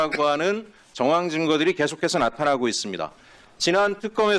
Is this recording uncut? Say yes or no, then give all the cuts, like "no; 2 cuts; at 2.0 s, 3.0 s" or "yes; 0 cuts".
yes; 0 cuts